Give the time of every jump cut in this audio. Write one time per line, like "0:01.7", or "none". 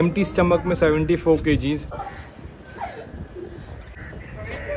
0:02.0
0:04.0